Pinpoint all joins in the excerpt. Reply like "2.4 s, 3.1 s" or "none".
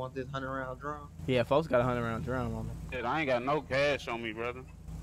none

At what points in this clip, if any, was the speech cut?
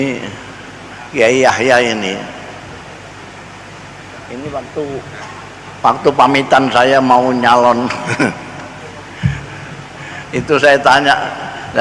none

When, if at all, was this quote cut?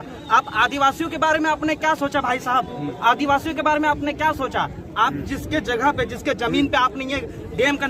none

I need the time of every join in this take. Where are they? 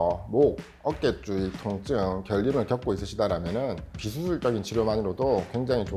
3.9 s

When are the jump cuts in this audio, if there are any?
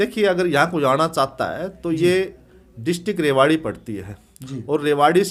none

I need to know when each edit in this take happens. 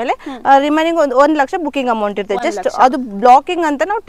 none

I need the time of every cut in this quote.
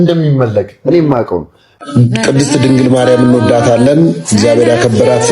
1.8 s

